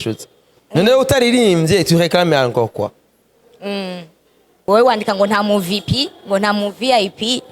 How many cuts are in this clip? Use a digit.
1